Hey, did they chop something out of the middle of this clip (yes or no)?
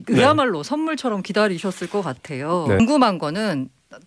yes